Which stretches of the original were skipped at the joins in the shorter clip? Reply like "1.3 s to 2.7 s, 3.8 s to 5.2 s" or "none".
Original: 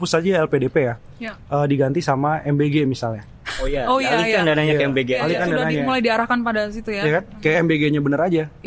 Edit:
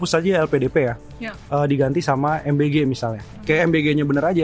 3.4 s to 7.3 s

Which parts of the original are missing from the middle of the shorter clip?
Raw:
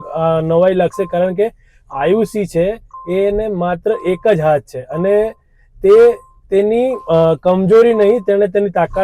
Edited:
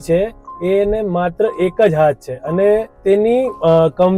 5.4 s to 6.4 s

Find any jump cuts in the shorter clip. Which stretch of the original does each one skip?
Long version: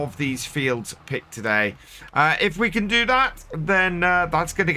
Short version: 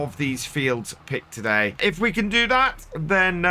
1.8 s to 2.4 s

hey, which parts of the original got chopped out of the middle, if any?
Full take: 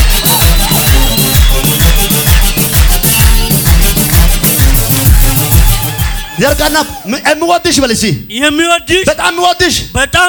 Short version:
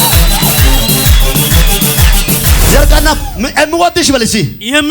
2.9 s to 6.3 s

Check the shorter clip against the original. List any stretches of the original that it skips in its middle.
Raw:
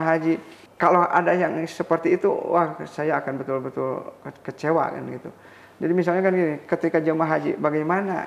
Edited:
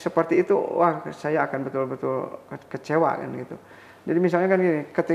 none

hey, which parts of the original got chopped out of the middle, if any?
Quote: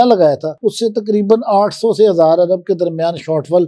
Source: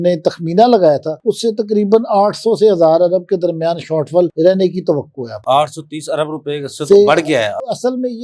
none

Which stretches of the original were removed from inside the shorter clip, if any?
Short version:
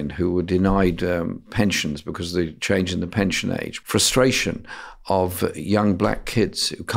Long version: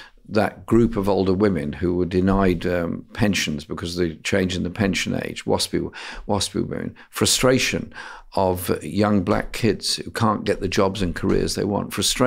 5.3 s to 7.0 s

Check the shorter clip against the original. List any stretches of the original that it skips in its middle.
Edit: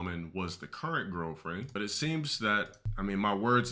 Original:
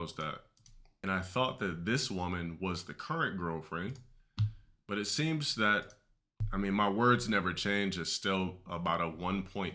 4.0 s to 4.9 s, 6.0 s to 6.4 s

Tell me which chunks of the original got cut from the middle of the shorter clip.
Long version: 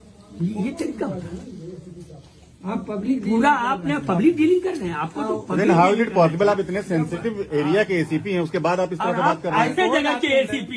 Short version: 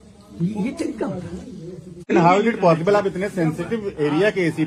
2.1 s to 5.6 s

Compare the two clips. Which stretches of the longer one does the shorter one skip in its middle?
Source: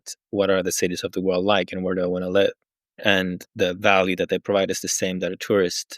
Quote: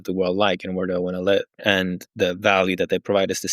2.6 s to 2.9 s

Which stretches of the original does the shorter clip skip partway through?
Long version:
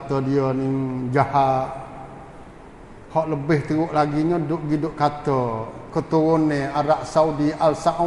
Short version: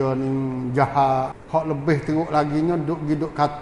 1.8 s to 3.0 s

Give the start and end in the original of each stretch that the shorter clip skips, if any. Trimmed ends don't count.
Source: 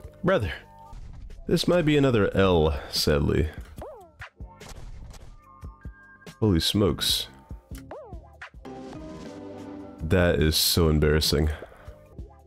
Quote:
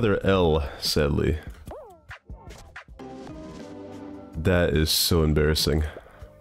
4.7 s to 8.3 s

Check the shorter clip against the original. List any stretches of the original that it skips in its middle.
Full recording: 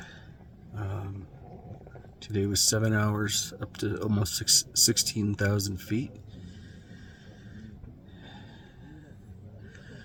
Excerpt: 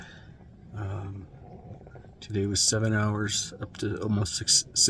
none

